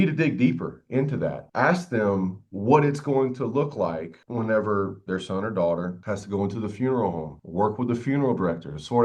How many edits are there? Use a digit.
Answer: 1